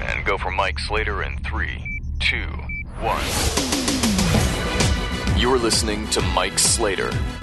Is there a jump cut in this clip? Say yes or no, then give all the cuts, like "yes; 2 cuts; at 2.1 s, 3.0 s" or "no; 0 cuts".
no; 0 cuts